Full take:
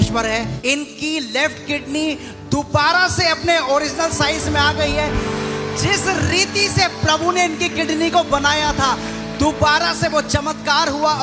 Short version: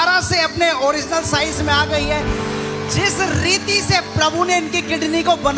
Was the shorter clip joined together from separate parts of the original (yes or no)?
no